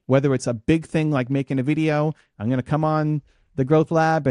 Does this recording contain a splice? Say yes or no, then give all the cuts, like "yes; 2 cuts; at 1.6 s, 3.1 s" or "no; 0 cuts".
no; 0 cuts